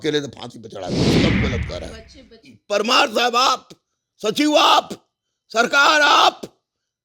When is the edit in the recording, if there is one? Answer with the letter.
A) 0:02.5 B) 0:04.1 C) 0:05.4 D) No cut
A